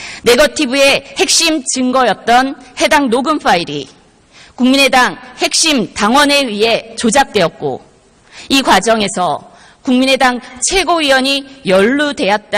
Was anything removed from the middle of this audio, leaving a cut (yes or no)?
yes